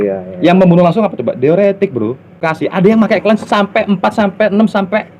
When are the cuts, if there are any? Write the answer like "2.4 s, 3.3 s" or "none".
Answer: 2.5 s